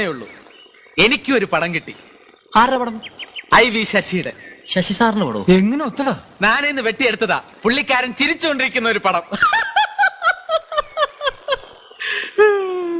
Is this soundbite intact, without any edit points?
yes; 0 cuts

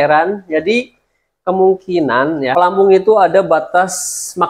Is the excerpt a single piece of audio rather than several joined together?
no; 1 cut; at 2.5 s

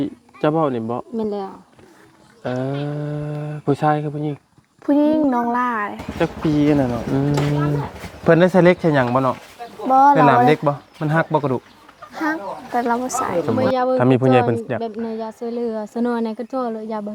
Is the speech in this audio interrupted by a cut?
yes; 2 cuts; at 7.0 s, 13.5 s

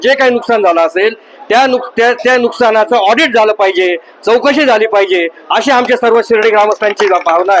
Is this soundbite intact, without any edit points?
yes; 0 cuts

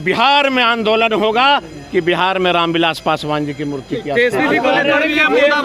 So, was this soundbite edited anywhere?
no; 0 cuts

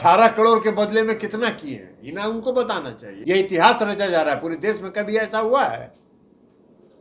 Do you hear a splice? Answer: yes; 1 cut; at 3.0 s

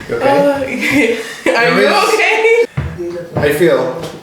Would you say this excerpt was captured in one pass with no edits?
no; 1 cut; at 2.7 s

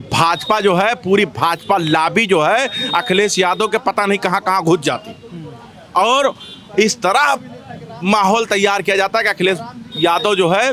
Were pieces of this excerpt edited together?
no; 0 cuts

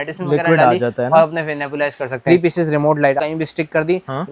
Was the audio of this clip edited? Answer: yes; 2 cuts; at 2.1 s, 3.2 s

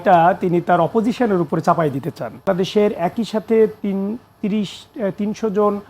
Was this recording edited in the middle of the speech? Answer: yes; 1 cut; at 2.5 s

